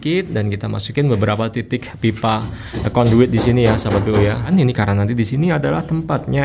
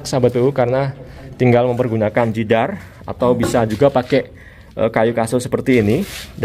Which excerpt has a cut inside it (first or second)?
first